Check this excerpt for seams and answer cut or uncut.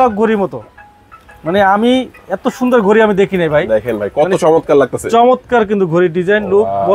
uncut